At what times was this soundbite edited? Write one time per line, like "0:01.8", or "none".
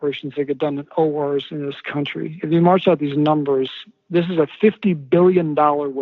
none